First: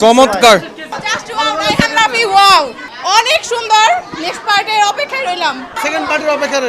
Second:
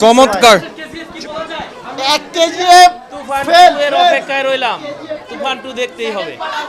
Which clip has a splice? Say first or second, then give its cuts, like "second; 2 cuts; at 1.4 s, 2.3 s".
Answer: first; 3 cuts; at 0.9 s, 2.8 s, 5.7 s